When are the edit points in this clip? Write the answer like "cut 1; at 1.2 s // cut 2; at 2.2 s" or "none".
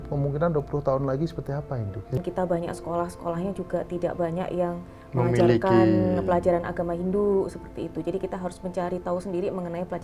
cut 1; at 2.2 s

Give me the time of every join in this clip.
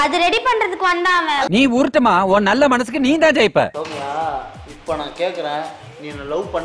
cut 1; at 3.7 s

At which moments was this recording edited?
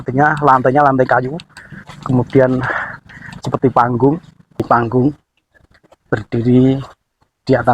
cut 1; at 4.6 s

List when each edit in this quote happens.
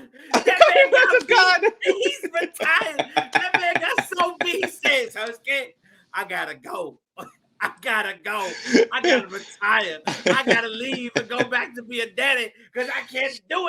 none

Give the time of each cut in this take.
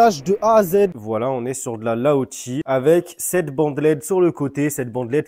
cut 1; at 1.0 s // cut 2; at 2.5 s

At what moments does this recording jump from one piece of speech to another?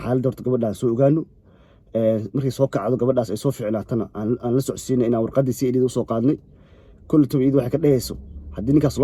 none

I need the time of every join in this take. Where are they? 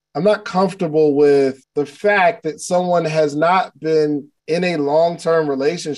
cut 1; at 1.6 s // cut 2; at 4.3 s

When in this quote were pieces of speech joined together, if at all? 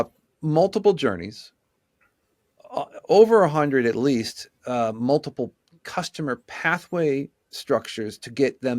none

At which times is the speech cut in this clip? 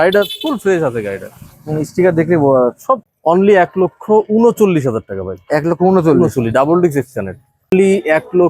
cut 1; at 3.1 s // cut 2; at 7.7 s

